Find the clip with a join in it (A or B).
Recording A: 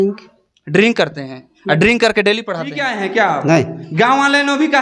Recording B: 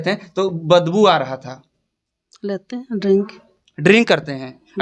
A